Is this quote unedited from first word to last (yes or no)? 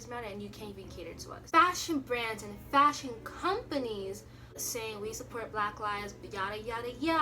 no